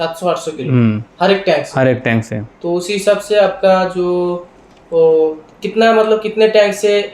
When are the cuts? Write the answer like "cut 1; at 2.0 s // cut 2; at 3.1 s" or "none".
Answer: none